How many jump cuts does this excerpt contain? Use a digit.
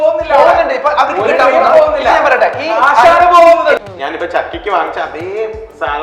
1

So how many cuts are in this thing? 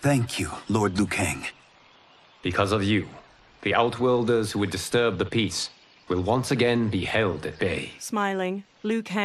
1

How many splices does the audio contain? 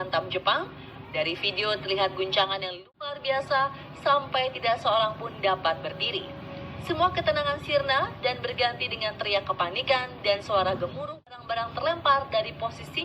2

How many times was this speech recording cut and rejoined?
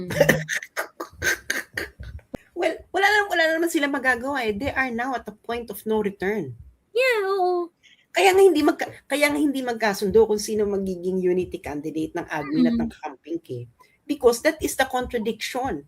1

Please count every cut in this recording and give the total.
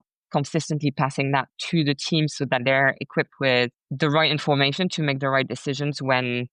1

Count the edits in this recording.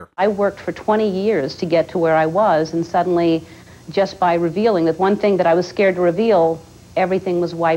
0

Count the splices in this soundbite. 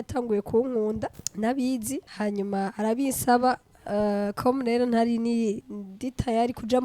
3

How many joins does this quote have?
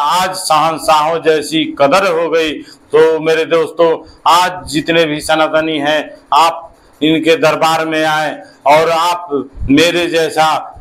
0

